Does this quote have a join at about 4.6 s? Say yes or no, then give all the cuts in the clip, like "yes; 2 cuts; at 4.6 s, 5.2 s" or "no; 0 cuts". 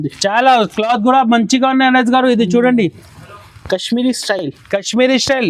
no; 0 cuts